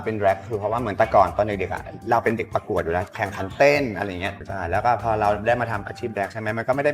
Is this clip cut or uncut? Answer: uncut